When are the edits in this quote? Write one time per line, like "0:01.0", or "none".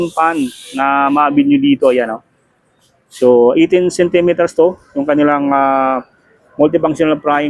none